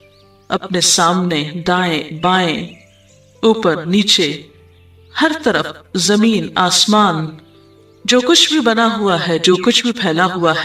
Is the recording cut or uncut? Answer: uncut